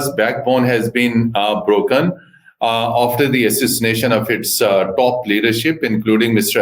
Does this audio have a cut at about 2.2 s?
no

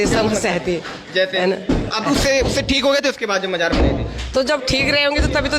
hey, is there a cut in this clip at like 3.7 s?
no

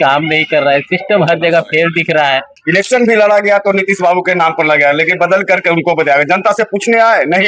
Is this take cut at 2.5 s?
yes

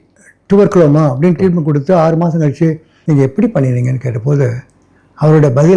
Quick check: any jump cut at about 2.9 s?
yes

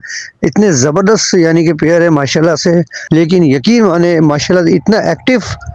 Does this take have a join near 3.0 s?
yes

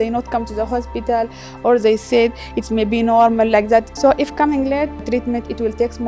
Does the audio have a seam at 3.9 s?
yes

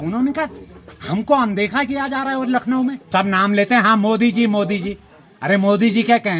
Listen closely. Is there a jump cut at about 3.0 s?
yes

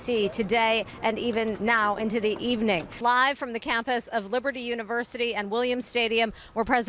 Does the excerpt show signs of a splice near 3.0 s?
yes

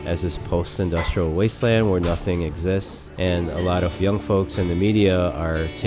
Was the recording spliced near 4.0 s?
yes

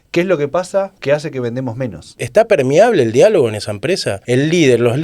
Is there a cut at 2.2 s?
yes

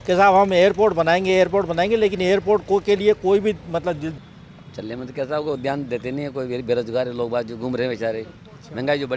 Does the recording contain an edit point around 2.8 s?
no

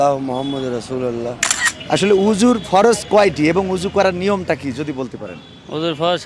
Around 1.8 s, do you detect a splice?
yes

